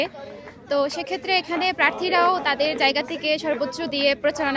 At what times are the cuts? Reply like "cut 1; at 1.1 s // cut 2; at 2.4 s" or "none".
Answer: none